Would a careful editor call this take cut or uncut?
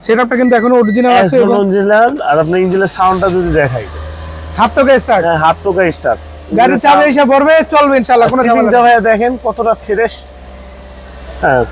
uncut